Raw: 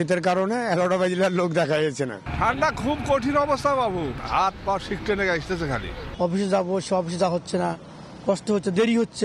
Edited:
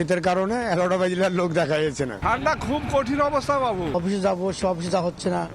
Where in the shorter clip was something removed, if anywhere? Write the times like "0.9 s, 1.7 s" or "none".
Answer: 2.2 s, 3.9 s